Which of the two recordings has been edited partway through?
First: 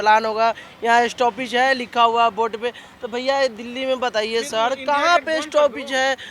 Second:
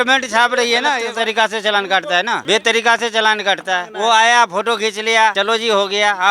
second; 4 cuts; at 1.0 s, 2.4 s, 3.9 s, 5.4 s

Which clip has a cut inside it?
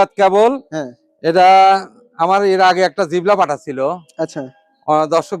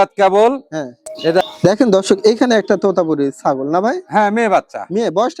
second; 1 cut; at 1.4 s

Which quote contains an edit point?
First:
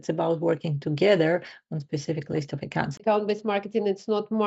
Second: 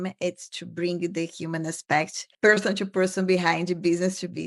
first; 1 cut; at 2.9 s

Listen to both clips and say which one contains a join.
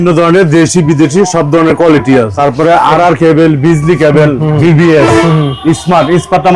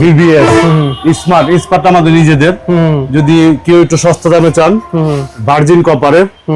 first; 1 cut; at 2.3 s

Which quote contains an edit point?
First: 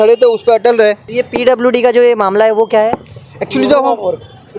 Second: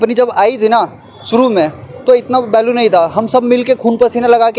first; 1 cut; at 1.1 s

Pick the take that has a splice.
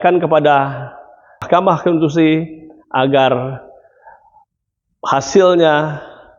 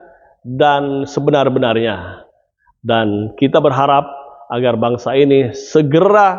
first; 1 cut; at 1.4 s

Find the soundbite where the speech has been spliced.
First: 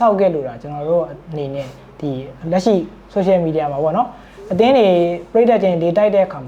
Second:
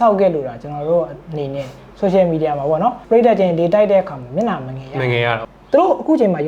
second; 3 cuts; at 1.8 s, 3.0 s, 5.4 s

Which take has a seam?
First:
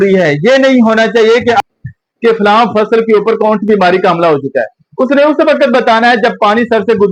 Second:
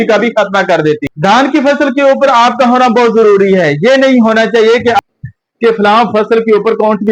second; 1 cut; at 1.1 s

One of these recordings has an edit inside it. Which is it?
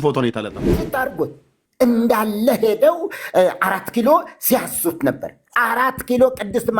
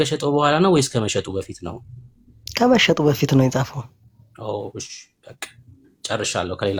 first; 1 cut; at 0.9 s

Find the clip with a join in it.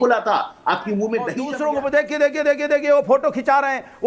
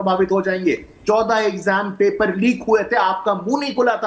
first; 1 cut; at 1.4 s

